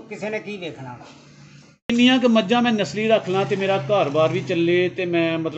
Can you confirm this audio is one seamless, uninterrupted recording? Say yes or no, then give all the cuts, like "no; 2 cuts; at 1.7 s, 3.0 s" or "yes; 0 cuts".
no; 1 cut; at 1.9 s